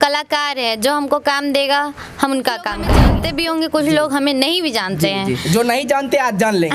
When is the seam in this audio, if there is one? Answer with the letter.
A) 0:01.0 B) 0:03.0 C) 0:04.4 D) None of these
B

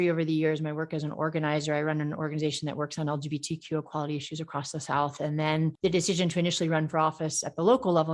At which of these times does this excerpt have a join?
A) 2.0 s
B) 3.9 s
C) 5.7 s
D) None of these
C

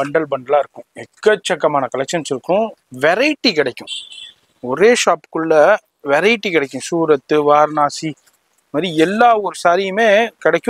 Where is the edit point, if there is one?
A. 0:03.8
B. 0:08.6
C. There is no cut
C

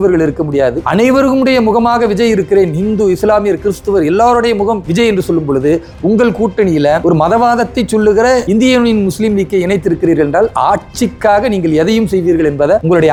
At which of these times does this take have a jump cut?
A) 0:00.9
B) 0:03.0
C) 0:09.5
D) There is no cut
D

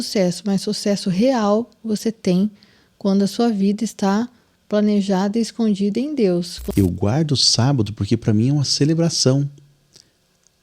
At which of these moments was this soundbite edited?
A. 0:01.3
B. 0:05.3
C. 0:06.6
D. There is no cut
C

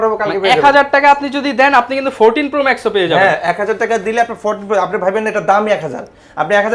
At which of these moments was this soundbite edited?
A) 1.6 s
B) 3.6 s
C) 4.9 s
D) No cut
D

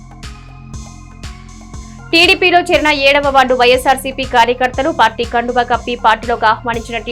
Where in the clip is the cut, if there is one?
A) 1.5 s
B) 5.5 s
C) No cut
A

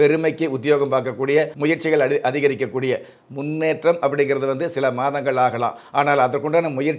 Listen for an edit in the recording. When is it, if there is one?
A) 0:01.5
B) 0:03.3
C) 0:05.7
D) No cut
A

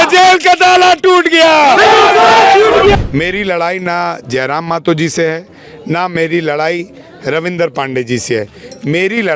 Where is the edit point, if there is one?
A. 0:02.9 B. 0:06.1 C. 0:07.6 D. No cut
A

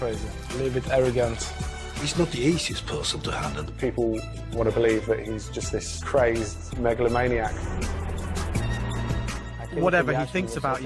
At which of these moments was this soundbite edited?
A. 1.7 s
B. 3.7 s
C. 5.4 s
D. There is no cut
B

